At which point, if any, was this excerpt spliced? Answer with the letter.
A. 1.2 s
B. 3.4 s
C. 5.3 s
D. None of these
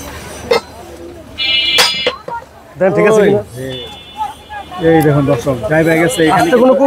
D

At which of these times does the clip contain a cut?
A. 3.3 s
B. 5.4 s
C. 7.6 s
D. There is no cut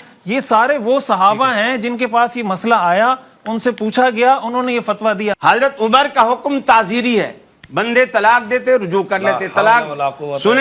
B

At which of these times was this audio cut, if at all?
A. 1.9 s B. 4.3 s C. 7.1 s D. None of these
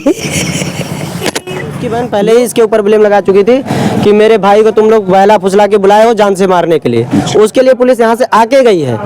A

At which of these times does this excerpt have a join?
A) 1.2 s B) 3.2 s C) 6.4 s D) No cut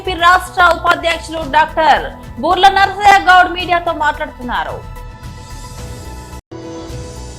C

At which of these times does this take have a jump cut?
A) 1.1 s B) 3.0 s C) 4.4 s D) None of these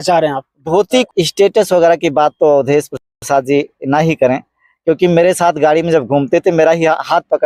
A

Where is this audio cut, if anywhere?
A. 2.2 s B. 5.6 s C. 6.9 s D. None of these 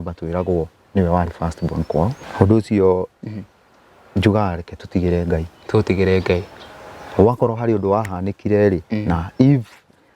A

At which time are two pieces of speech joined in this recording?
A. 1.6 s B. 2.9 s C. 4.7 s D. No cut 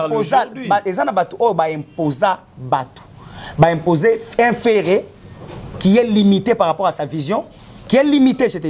D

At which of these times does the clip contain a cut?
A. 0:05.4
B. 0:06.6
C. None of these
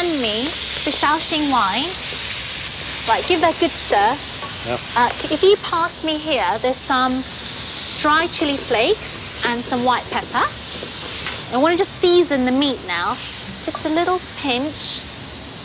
A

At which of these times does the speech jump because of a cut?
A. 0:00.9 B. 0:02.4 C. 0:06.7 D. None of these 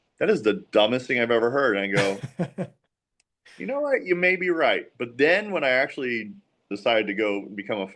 C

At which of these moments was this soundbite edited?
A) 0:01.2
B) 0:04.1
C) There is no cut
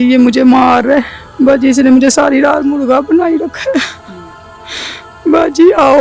A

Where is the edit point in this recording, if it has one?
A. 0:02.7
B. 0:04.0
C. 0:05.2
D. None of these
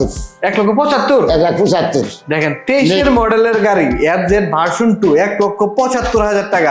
D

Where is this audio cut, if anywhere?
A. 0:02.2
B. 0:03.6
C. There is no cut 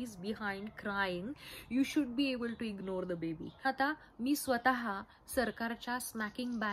B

